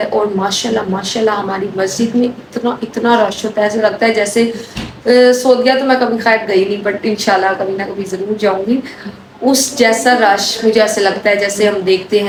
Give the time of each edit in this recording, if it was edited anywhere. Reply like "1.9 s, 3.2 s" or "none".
none